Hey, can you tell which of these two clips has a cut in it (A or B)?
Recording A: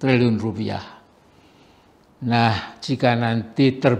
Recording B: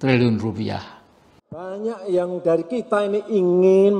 B